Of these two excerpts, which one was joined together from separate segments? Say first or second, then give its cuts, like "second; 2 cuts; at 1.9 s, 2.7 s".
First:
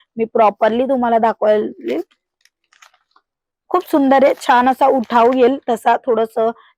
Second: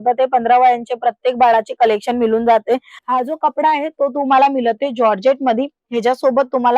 second; 1 cut; at 2.9 s